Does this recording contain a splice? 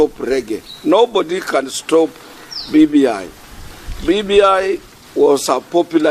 no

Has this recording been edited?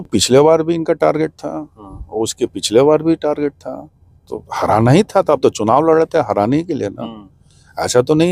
no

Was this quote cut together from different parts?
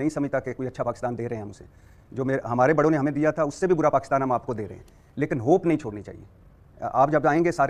no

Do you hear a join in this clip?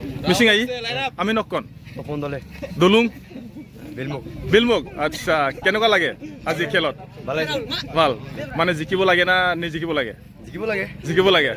no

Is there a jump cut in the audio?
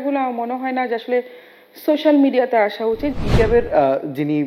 yes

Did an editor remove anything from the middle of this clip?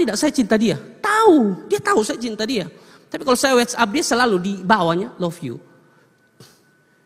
no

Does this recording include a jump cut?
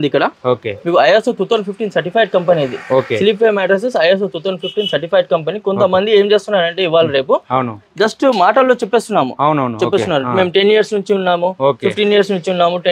no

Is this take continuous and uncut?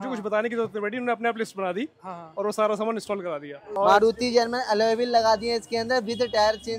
no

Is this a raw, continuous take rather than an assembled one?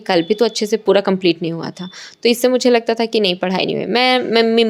yes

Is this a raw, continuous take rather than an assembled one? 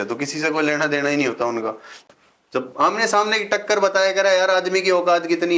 no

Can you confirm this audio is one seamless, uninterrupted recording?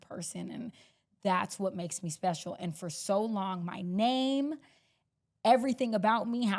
yes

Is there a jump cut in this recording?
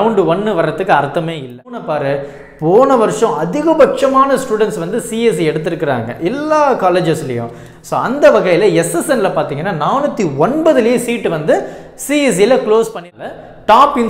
yes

